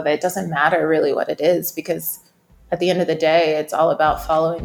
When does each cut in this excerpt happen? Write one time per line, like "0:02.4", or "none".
none